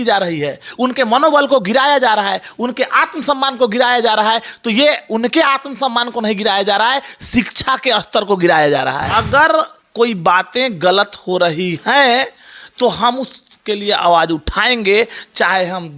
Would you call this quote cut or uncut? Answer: cut